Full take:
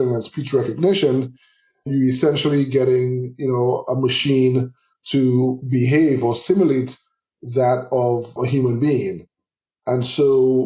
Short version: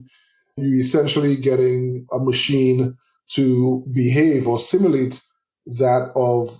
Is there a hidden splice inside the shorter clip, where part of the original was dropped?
yes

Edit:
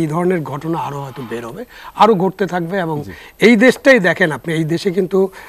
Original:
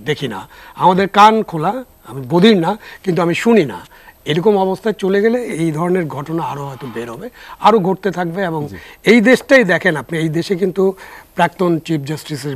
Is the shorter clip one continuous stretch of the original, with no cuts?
yes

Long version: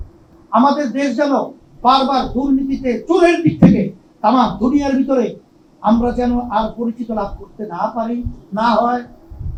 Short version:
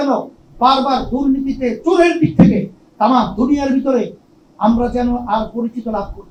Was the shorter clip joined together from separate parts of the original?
no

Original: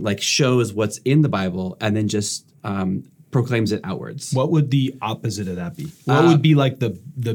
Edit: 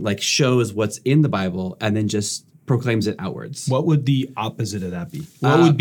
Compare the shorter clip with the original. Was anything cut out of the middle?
yes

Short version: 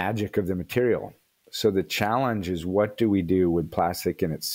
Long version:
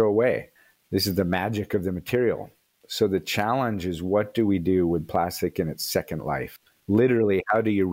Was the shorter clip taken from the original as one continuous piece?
yes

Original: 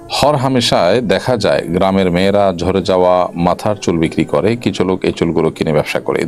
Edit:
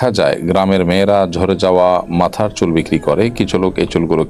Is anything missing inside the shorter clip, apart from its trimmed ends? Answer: no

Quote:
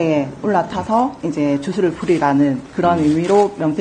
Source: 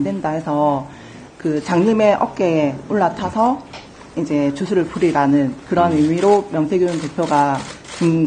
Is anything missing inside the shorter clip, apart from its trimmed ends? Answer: yes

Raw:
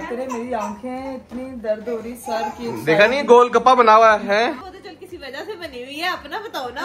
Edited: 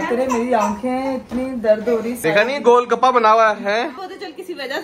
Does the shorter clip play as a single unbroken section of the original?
no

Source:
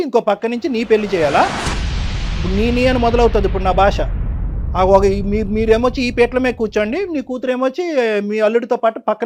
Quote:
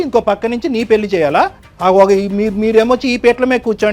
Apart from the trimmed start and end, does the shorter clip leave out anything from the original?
yes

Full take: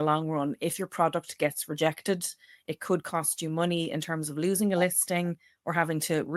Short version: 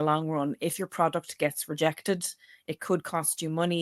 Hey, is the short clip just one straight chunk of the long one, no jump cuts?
yes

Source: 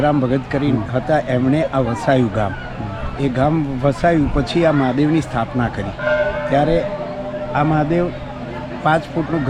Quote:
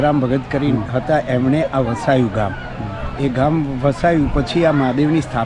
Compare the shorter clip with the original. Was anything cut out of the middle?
no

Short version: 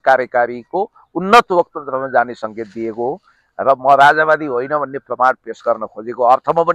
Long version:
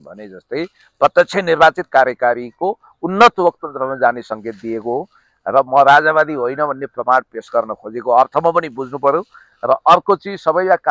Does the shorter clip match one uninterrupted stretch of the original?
yes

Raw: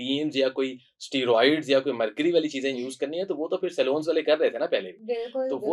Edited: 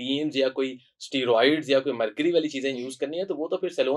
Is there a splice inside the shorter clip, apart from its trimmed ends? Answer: no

